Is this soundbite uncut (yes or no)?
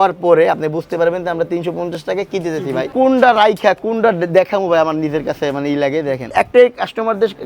no